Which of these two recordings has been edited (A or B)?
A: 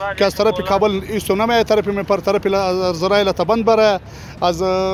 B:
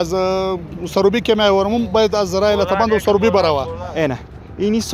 B